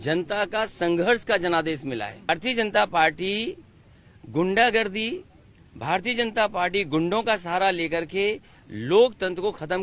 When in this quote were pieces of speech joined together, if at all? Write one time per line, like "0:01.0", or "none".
0:02.3